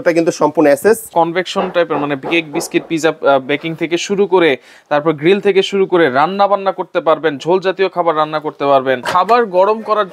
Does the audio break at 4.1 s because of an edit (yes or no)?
no